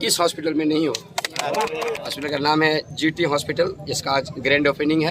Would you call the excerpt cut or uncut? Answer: cut